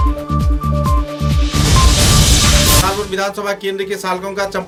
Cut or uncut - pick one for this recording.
uncut